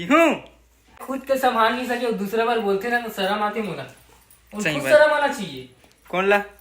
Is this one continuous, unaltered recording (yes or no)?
no